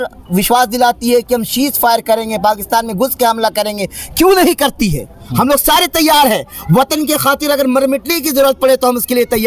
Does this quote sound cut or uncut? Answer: uncut